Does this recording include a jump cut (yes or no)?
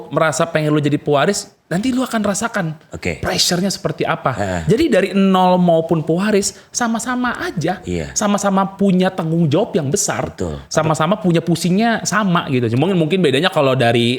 no